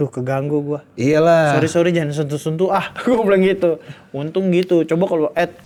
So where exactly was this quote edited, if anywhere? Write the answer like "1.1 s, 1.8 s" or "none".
none